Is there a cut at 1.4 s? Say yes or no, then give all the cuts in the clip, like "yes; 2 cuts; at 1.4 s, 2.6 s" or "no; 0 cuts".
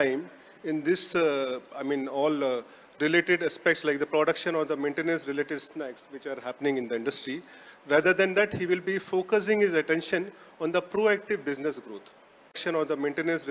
no; 1 cut; at 12.6 s